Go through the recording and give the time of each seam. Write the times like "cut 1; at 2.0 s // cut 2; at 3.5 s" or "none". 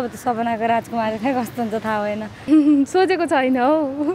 cut 1; at 2.3 s

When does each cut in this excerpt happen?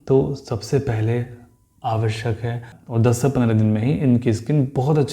cut 1; at 2.8 s

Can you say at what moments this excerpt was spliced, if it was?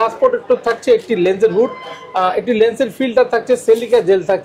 none

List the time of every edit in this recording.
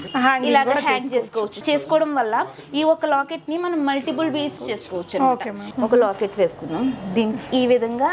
cut 1; at 1.6 s // cut 2; at 4.6 s // cut 3; at 5.6 s

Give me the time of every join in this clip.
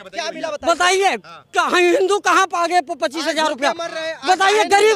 none

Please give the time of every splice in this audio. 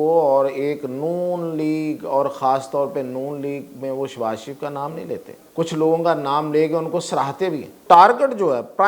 cut 1; at 5.4 s // cut 2; at 7.8 s

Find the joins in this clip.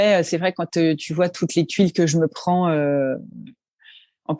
none

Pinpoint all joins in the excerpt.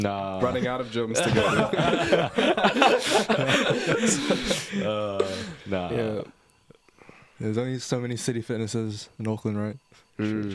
none

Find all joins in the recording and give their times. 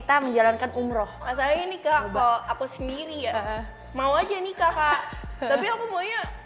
cut 1; at 1.2 s

